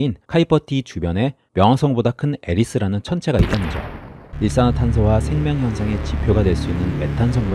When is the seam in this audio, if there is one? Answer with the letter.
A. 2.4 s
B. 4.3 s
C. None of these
B